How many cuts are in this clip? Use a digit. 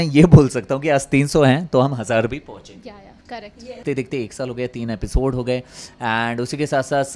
1